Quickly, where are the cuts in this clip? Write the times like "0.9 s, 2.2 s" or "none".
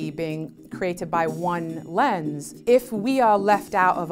2.5 s

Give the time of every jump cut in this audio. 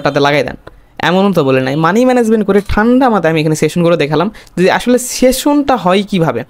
none

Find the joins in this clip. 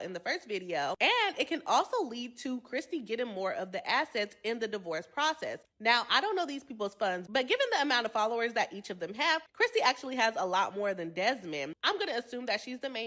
none

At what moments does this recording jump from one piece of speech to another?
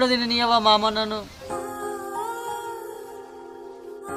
1.4 s

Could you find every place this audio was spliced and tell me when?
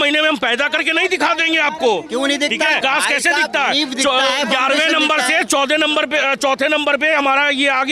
2.8 s

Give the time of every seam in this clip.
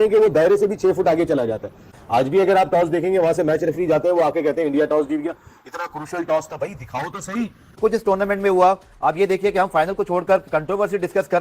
7.7 s

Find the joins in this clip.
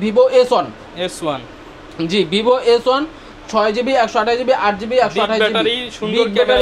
none

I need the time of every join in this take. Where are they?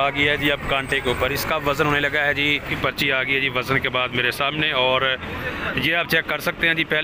2.7 s

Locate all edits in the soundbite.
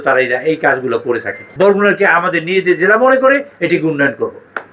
1.4 s

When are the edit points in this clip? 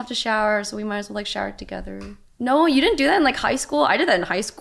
2.2 s

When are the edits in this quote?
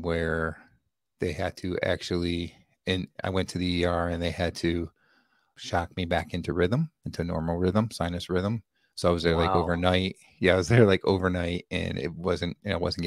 5.5 s

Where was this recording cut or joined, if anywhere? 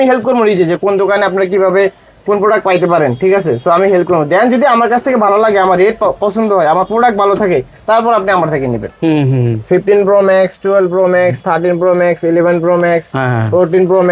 8.9 s

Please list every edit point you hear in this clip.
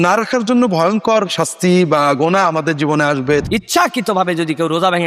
3.4 s

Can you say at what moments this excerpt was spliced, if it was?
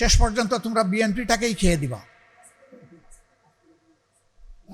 none

